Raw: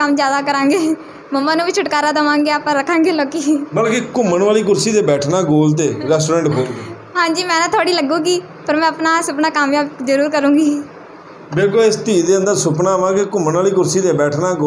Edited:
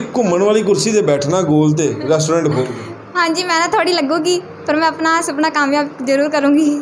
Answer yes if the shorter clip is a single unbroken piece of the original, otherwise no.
yes